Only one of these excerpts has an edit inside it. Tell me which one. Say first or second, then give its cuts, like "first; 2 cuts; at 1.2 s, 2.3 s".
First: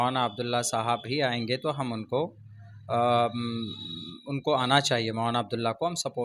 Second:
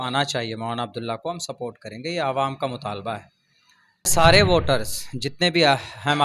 second; 1 cut; at 4.1 s